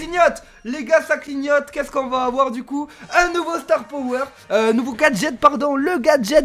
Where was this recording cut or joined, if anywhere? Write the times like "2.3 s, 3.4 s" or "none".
none